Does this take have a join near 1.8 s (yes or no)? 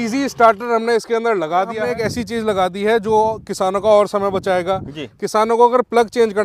yes